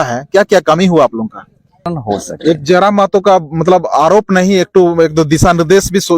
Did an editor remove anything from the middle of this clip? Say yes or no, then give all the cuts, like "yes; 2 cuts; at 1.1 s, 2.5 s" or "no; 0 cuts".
yes; 1 cut; at 1.9 s